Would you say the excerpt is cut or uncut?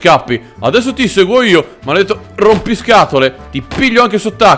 uncut